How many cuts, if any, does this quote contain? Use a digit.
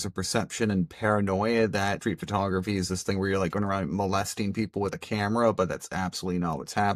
0